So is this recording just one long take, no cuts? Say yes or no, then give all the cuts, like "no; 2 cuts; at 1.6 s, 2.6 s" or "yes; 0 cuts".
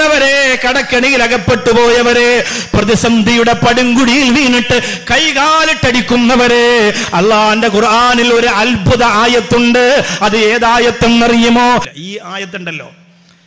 no; 1 cut; at 11.9 s